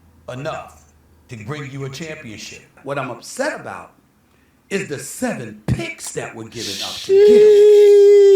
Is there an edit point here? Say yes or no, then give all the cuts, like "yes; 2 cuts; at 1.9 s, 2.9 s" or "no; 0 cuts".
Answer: yes; 1 cut; at 2.8 s